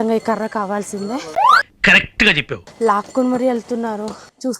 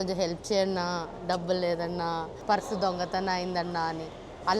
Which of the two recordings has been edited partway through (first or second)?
first